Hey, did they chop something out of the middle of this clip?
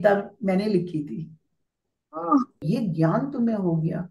yes; 1 cut; at 2.6 s

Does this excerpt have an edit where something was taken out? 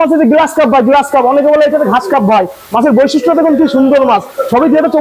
no; 0 cuts

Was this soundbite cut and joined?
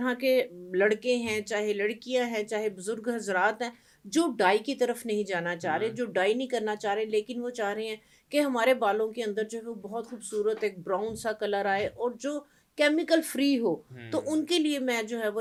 no; 0 cuts

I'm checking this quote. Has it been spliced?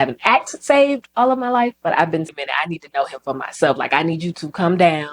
yes; 1 cut; at 2.3 s

